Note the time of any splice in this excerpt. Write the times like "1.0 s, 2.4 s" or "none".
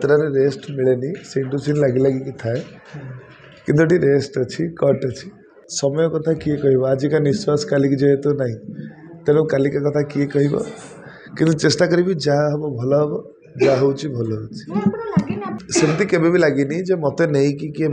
5.6 s, 15.6 s